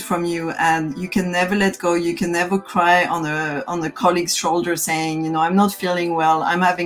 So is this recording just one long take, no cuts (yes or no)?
yes